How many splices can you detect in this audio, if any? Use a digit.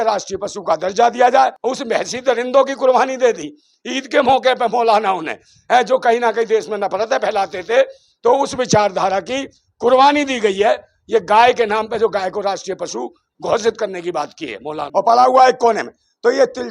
2